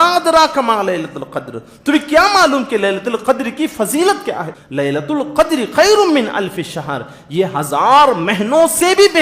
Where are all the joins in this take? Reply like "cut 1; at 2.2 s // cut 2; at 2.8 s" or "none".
cut 1; at 4.5 s